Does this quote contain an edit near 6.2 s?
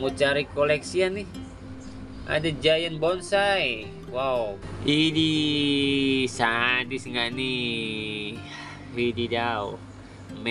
no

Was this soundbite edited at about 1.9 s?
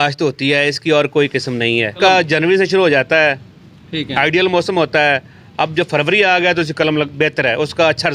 yes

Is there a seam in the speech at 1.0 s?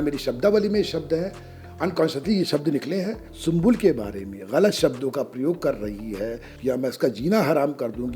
no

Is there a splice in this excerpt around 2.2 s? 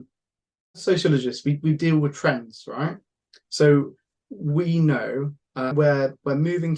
no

